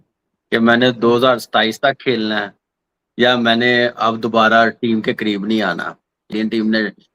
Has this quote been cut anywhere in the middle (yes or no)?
yes